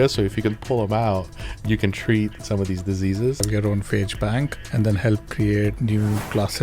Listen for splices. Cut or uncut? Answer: cut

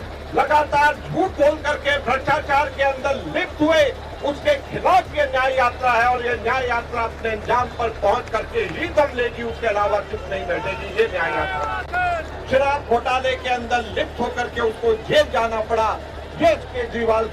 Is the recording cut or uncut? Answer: cut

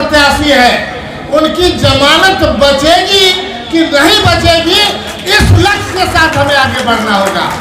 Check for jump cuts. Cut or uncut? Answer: uncut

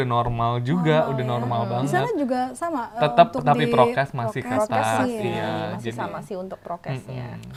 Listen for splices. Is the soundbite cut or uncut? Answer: uncut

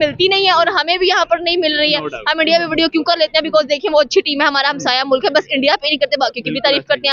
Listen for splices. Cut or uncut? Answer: uncut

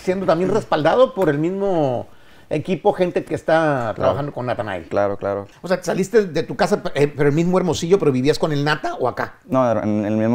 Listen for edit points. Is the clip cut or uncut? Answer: cut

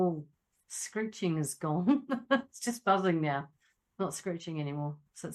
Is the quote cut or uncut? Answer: uncut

